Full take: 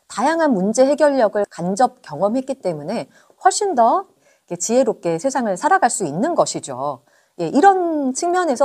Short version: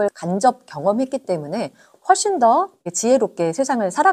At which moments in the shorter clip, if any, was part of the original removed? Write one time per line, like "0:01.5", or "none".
0:02.8